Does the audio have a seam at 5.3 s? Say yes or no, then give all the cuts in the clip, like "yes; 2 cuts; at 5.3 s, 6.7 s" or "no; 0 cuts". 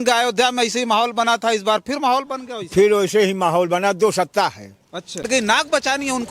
yes; 1 cut; at 5.3 s